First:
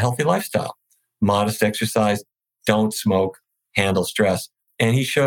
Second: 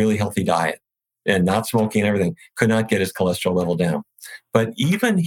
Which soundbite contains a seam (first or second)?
second